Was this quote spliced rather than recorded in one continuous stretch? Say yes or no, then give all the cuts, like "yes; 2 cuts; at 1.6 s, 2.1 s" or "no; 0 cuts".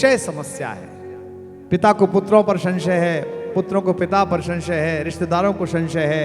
no; 0 cuts